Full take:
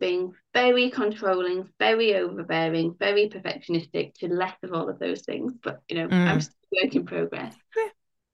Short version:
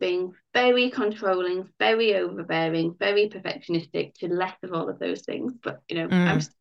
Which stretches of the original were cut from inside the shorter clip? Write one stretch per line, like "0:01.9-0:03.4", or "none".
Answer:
none